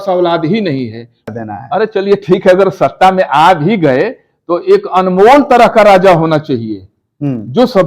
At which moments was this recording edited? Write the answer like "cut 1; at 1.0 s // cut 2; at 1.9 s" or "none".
cut 1; at 1.3 s